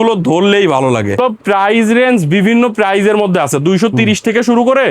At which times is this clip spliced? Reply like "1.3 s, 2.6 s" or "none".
1.2 s